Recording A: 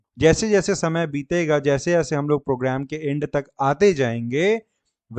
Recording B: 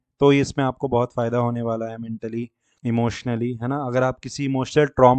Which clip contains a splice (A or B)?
B